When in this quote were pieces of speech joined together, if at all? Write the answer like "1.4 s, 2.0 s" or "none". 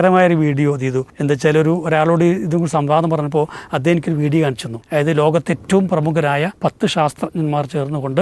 1.1 s, 4.7 s, 6.5 s

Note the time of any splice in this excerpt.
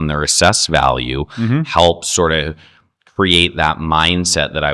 none

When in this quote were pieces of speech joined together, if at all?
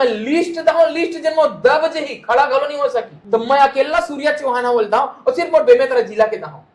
3.2 s

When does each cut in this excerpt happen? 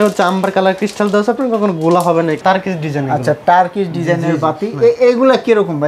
2.4 s

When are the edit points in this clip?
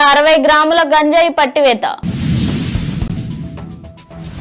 none

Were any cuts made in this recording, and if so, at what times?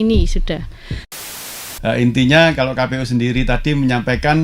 1.2 s

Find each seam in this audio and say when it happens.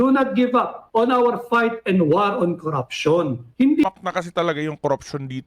3.8 s

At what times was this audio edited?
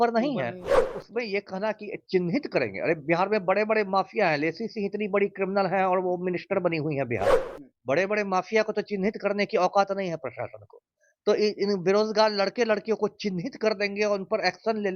1.0 s

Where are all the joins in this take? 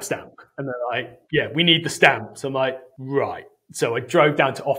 2.9 s

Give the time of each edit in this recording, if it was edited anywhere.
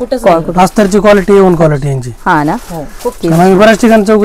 none

